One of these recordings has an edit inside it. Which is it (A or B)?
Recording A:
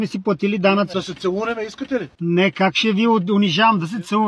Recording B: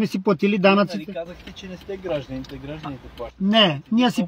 A